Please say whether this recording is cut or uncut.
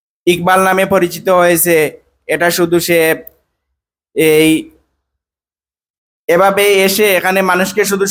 uncut